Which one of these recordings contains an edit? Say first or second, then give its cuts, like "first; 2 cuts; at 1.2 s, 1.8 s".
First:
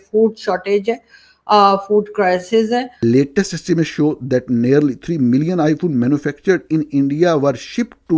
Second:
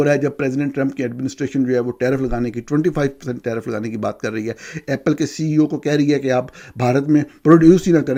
first; 1 cut; at 3.0 s